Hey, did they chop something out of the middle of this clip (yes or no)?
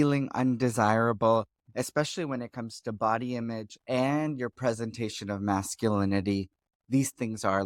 no